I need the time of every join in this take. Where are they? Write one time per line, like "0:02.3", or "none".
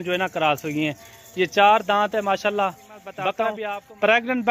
0:03.6